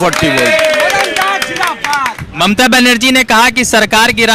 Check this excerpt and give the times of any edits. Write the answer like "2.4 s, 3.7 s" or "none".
none

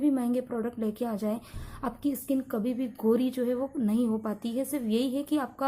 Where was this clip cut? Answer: none

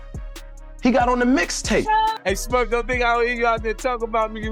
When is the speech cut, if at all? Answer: 2.0 s

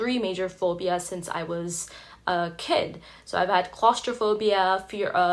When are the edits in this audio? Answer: none

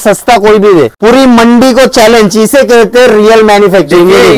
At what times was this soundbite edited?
0.9 s

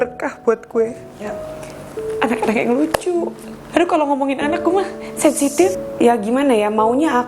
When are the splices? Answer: 5.7 s

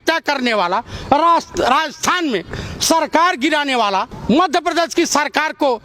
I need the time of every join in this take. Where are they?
4.1 s

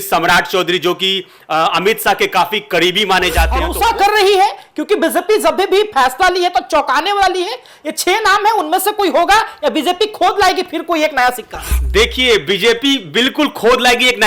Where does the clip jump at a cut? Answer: 3.6 s

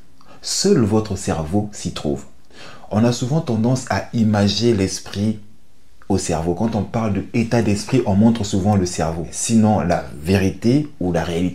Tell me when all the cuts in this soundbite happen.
9.3 s

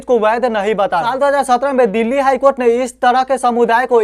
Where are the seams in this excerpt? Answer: 1.1 s

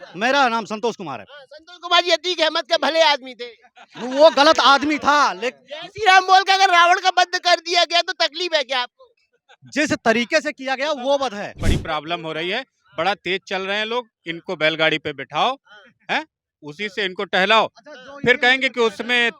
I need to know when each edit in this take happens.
11.6 s

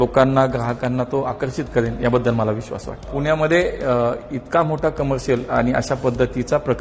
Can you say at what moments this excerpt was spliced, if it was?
3.1 s

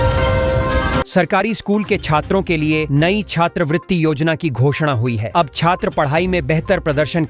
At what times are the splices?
1.1 s

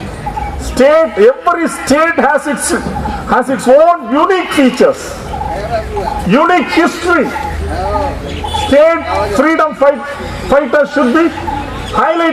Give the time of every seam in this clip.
none

